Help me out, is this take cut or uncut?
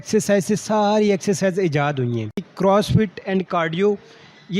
cut